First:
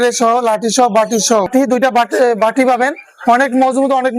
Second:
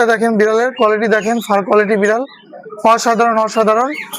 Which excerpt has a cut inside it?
first; 1 cut; at 1.5 s

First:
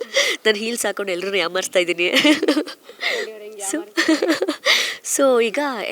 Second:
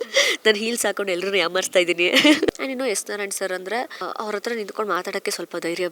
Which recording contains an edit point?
second; 2 cuts; at 2.5 s, 4.0 s

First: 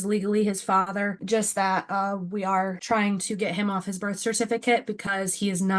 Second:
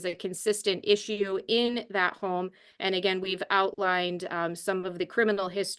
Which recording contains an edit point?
first; 2 cuts; at 1.2 s, 2.8 s

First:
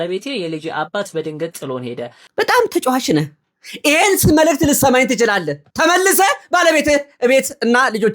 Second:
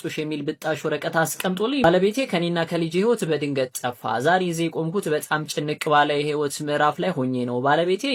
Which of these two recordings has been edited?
first; 1 cut; at 2.2 s

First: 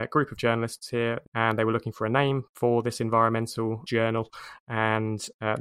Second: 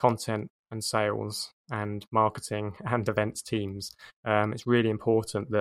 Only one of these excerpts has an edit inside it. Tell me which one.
first; 3 cuts; at 1.3 s, 2.5 s, 3.8 s

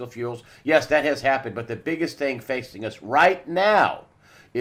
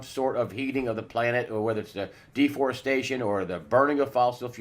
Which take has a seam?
second; 1 cut; at 2.8 s

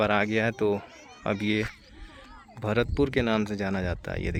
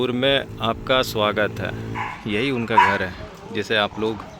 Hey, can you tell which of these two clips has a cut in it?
second; 1 cut; at 2.1 s

